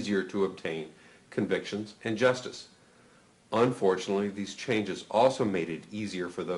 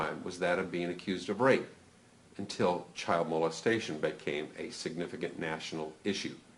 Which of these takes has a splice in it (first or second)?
first